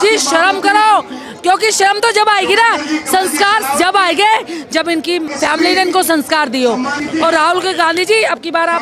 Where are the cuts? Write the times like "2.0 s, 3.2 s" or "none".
5.3 s, 7.0 s

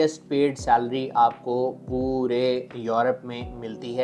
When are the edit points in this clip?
none

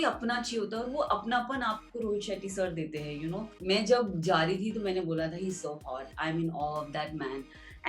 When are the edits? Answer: 3.5 s

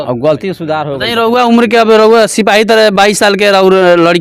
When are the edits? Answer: 0.9 s

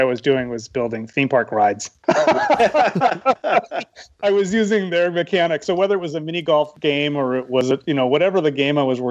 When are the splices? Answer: 6.7 s

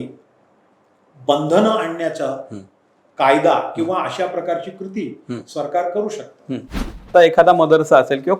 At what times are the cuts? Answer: 7.1 s

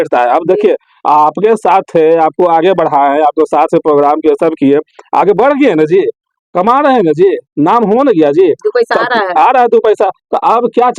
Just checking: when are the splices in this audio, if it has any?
none

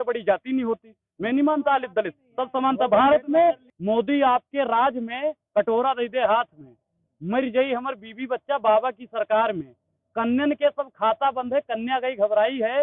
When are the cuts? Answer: 3.6 s

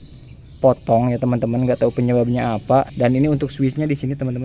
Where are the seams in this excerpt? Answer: 2.9 s

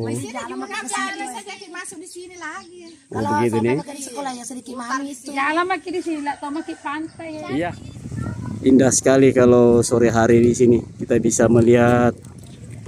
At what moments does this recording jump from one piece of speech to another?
7.9 s

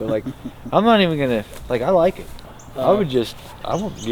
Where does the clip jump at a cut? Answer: 2.4 s

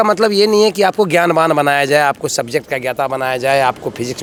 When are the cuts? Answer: none

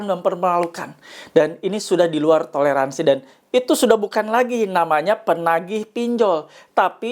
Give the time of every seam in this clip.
none

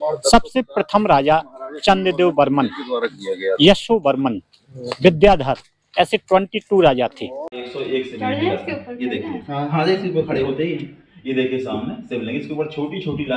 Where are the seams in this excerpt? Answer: 7.6 s

